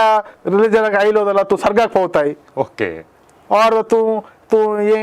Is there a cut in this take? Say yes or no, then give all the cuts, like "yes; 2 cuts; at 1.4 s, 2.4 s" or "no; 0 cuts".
no; 0 cuts